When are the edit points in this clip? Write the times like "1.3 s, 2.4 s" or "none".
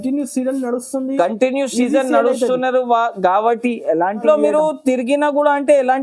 4.2 s